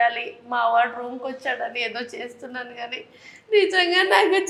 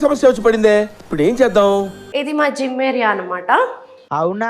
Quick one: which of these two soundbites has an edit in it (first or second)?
second